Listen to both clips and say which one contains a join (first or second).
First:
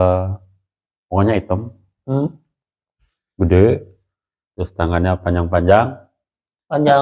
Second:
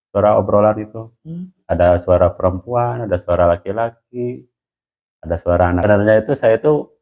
second